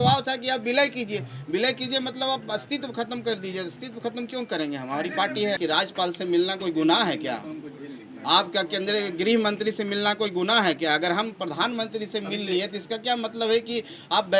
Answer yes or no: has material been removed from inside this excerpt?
yes